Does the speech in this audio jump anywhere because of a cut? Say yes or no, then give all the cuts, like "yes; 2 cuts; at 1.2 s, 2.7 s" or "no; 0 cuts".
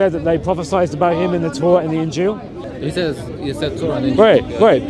yes; 1 cut; at 2.6 s